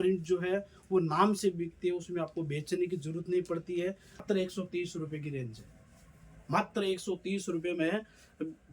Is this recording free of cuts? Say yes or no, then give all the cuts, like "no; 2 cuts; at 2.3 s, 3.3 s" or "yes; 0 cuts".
no; 1 cut; at 4.2 s